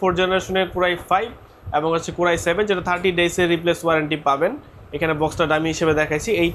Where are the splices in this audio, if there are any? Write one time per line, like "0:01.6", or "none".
none